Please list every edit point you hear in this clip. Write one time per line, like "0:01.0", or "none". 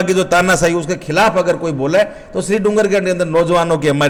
none